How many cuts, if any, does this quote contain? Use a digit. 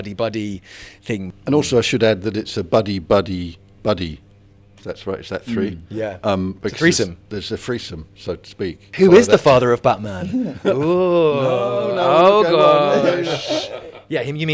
1